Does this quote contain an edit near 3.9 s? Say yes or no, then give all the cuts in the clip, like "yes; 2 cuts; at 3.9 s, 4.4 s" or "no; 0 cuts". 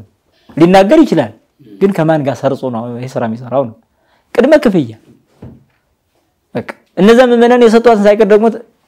no; 0 cuts